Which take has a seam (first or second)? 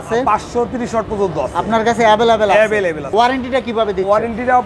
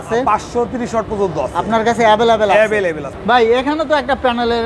first